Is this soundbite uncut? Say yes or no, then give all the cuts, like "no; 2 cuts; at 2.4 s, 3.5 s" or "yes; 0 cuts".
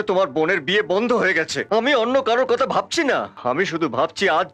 no; 2 cuts; at 1.6 s, 3.3 s